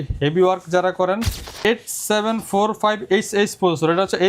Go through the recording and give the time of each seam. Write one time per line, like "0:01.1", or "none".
0:01.6